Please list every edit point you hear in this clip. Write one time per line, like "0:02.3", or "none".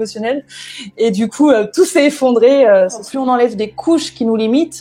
0:03.1